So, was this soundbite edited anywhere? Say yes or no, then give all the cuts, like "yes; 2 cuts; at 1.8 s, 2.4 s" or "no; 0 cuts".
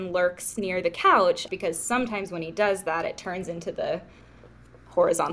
yes; 1 cut; at 1.4 s